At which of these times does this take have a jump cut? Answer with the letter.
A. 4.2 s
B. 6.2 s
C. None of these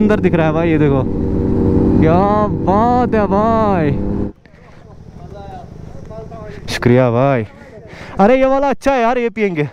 A